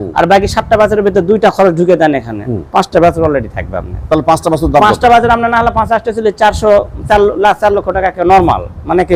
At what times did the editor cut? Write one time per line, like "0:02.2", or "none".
none